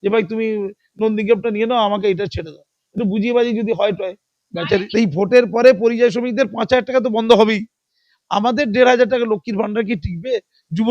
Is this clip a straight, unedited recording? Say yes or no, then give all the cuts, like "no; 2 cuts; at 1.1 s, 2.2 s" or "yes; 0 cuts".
no; 1 cut; at 4.9 s